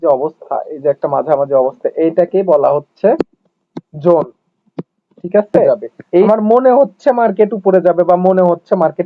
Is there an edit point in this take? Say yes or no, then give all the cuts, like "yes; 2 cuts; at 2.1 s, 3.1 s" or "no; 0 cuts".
yes; 1 cut; at 6.3 s